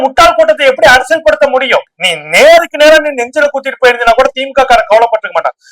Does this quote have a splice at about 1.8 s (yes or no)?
yes